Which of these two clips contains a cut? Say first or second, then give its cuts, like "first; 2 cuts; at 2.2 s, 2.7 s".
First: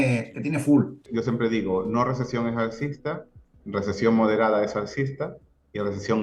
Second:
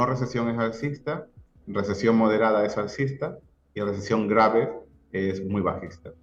first; 1 cut; at 1.0 s